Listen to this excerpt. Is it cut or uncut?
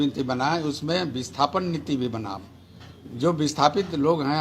uncut